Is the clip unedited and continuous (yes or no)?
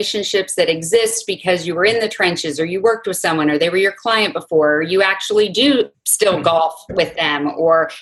yes